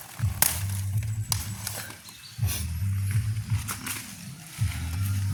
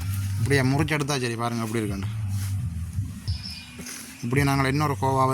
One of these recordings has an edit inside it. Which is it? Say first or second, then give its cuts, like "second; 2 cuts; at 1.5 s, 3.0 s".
second; 1 cut; at 3.3 s